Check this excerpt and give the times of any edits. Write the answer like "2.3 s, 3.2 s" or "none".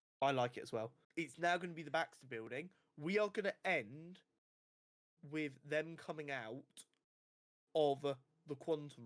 1.0 s